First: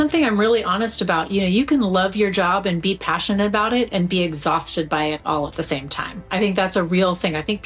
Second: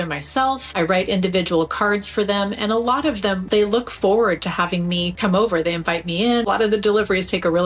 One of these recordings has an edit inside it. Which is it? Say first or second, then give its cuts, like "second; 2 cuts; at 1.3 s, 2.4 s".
second; 1 cut; at 6.4 s